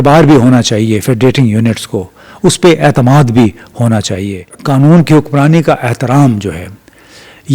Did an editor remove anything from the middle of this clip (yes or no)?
yes